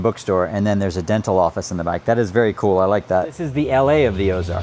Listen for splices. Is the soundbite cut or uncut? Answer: cut